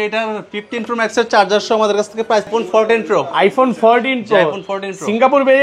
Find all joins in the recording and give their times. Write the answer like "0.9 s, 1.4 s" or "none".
2.5 s